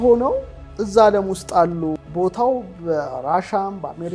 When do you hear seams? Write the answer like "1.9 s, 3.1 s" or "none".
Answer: 2.0 s